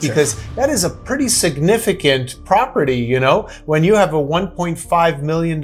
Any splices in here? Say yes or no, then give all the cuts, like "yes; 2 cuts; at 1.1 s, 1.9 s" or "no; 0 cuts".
no; 0 cuts